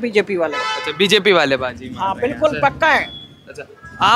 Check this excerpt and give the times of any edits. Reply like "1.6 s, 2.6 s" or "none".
none